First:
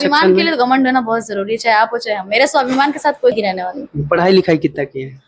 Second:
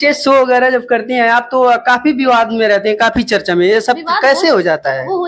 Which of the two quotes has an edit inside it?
first; 1 cut; at 3.3 s

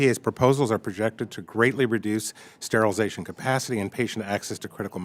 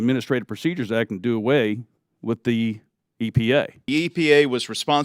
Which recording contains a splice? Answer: second; 1 cut; at 3.9 s

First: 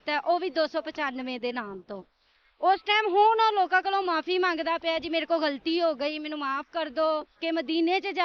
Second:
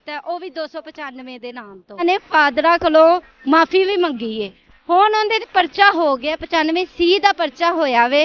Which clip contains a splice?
second; 1 cut; at 2.0 s

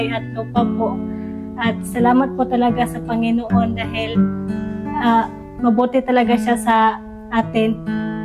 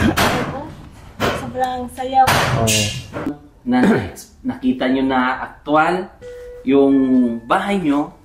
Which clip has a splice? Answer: second; 1 cut; at 3.5 s

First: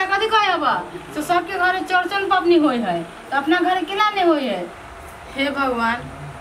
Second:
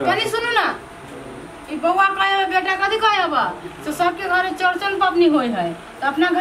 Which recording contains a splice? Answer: first; 1 cut; at 4.8 s

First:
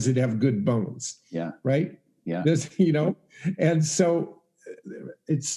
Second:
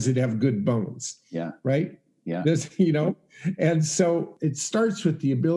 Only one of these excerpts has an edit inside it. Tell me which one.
second; 1 cut; at 4.3 s

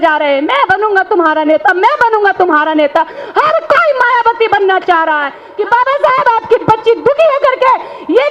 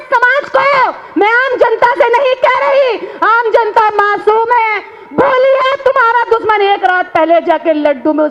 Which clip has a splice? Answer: first; 1 cut; at 5.4 s

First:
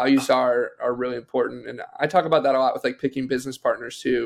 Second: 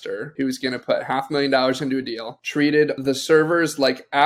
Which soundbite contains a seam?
second; 1 cut; at 3.0 s

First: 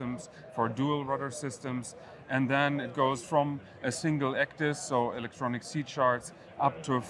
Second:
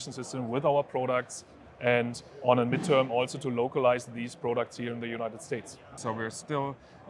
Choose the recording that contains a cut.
second; 1 cut; at 5.9 s

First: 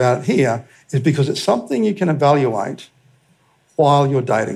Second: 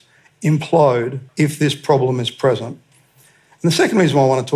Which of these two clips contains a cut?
second; 1 cut; at 1.2 s

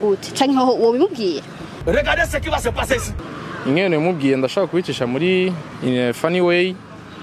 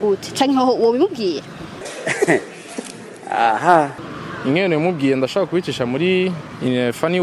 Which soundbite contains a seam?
second; 2 cuts; at 1.8 s, 4.0 s

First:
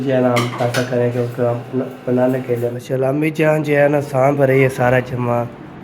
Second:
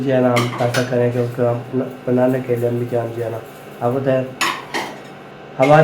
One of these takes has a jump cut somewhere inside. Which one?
first; 1 cut; at 2.8 s

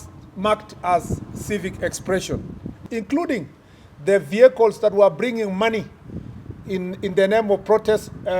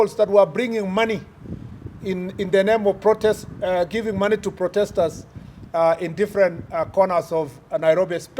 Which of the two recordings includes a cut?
first; 1 cut; at 2.8 s

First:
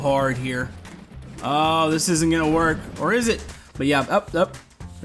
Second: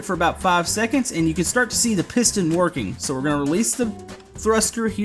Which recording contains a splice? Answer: first; 1 cut; at 3.5 s

